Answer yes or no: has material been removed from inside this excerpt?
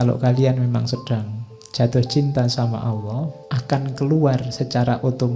yes